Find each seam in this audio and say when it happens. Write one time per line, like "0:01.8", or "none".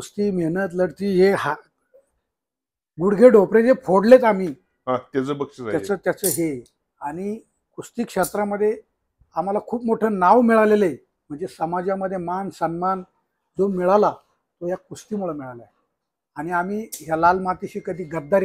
none